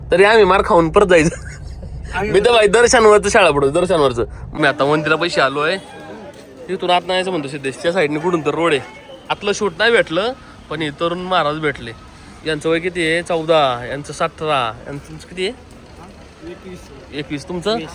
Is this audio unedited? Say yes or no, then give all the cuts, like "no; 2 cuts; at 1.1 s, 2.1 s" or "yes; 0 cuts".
no; 2 cuts; at 4.4 s, 9.4 s